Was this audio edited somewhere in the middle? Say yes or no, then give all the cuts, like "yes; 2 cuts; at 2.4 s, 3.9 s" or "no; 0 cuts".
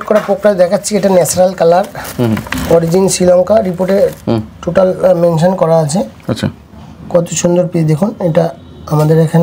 no; 0 cuts